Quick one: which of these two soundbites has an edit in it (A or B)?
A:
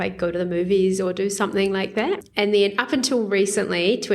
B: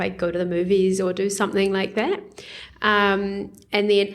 A